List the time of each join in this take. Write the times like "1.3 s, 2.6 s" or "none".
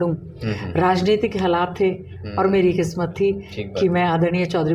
none